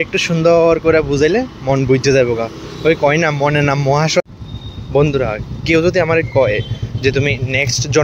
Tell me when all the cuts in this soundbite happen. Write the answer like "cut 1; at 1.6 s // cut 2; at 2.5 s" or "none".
cut 1; at 4.2 s